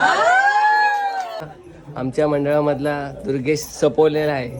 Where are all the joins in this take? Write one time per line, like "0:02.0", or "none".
0:01.4